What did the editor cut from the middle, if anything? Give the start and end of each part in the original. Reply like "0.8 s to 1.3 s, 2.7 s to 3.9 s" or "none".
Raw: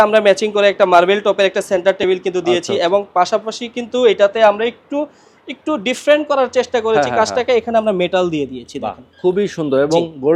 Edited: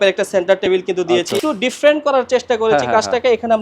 2.8 s to 5.6 s